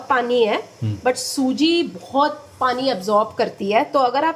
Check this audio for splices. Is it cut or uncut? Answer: uncut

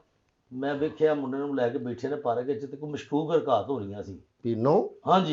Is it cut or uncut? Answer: uncut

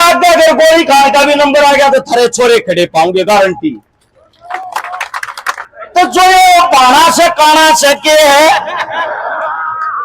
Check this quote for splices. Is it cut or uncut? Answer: cut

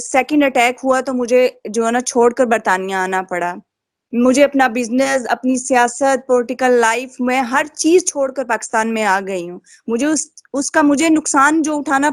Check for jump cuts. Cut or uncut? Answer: uncut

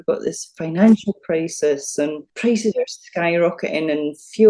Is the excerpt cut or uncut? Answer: cut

